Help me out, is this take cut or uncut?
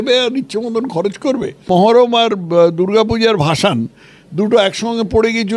cut